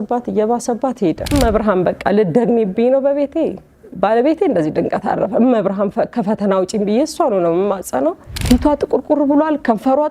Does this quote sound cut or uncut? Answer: cut